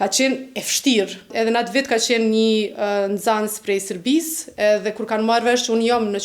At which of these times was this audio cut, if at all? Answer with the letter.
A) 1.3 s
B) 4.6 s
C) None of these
A